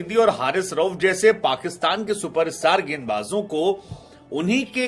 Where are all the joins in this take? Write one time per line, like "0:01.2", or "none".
none